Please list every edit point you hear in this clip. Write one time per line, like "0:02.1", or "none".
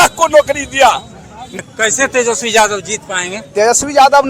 0:01.5

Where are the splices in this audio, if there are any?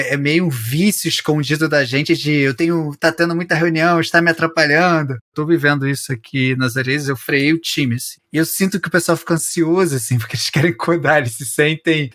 0:05.2
0:08.2

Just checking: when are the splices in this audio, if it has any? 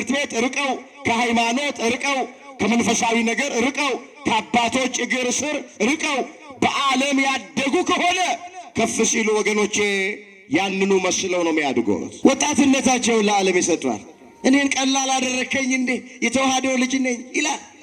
0:12.1

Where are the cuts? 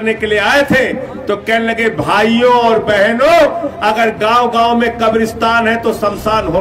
none

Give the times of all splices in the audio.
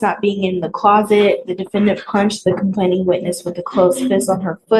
none

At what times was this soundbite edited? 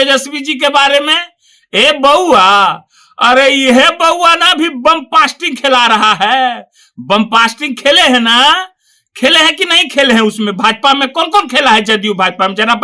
none

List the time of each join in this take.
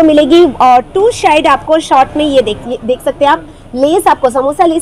none

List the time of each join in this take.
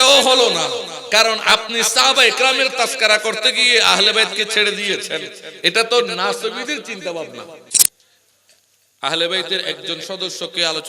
0:07.7

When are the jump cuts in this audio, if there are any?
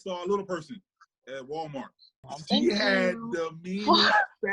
0:02.3

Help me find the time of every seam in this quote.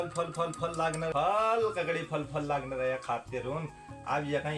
0:01.1

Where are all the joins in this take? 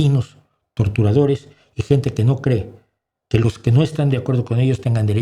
none

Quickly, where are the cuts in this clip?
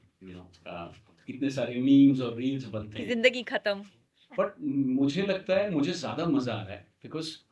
none

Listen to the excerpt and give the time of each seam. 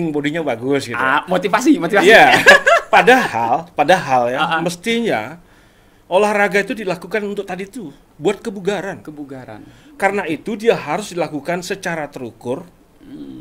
none

